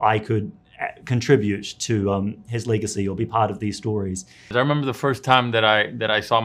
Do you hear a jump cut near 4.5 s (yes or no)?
yes